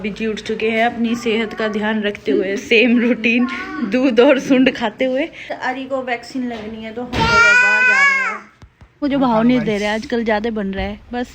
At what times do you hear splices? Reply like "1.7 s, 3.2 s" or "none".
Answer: 5.5 s, 9.0 s